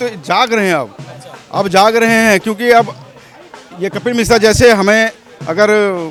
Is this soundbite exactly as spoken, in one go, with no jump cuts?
yes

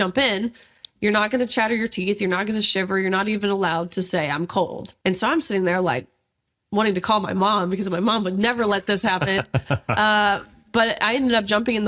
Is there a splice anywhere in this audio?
yes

